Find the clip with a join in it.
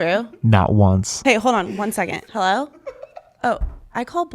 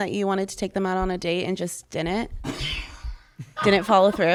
first; 2 cuts; at 1.1 s, 2.3 s

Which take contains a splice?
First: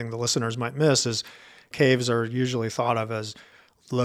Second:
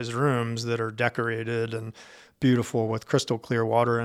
first; 1 cut; at 1.7 s

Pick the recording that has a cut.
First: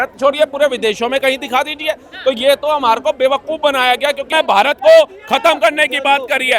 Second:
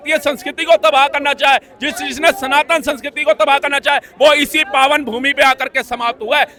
first; 1 cut; at 4.2 s

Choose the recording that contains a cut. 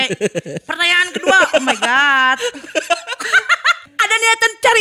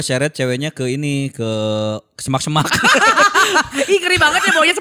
first; 1 cut; at 3.9 s

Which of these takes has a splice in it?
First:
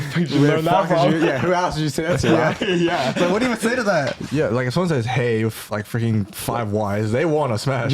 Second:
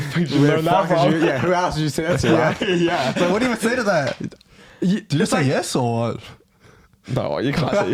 first; 1 cut; at 4.2 s

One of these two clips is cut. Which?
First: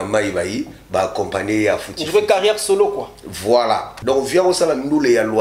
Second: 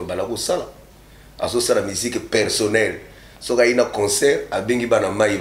first; 1 cut; at 3.9 s

